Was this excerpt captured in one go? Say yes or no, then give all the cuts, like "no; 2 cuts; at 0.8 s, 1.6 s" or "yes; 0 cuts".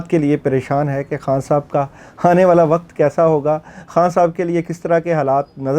yes; 0 cuts